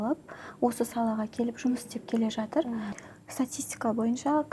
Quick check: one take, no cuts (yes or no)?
no